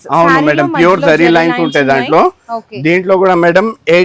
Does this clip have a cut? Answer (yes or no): no